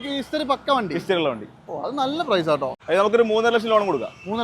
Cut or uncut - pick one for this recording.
cut